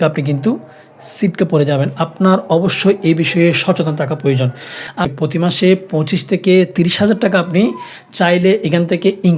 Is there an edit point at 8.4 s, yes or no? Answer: no